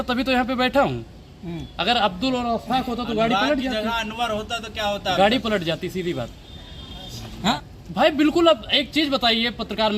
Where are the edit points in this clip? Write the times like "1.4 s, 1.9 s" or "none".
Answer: 7.5 s